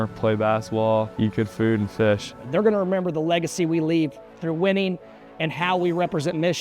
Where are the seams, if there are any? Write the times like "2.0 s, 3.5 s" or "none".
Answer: 1.1 s, 2.4 s